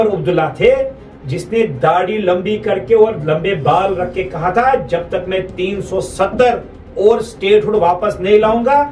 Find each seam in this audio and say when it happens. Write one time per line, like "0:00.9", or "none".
none